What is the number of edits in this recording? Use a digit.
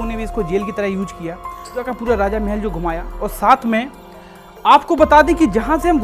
1